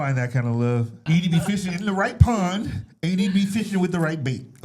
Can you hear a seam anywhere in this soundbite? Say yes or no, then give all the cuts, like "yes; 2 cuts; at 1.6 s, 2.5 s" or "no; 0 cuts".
yes; 1 cut; at 1.0 s